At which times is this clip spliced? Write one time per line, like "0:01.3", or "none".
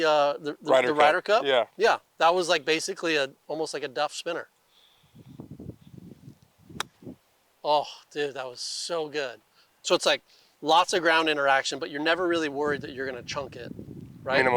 0:09.7